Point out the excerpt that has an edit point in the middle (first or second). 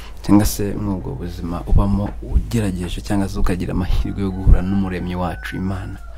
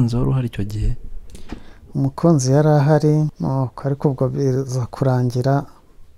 second